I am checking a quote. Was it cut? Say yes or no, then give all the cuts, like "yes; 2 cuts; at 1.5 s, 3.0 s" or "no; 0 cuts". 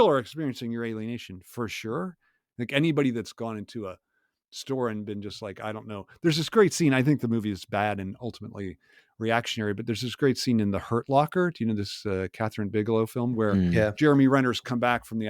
no; 0 cuts